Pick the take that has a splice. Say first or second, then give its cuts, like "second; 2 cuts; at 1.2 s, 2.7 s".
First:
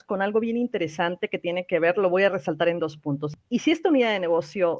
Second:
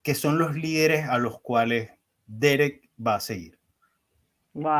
first; 1 cut; at 3.2 s